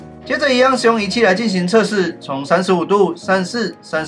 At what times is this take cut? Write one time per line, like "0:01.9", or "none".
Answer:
none